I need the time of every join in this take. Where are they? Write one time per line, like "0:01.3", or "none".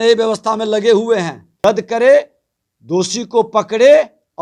0:01.5